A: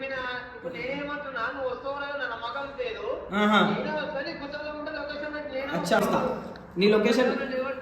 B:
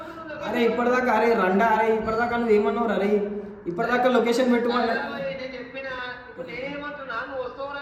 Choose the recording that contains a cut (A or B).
A